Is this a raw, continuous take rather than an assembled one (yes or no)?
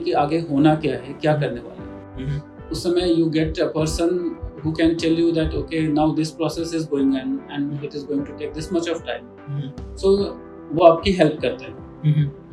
yes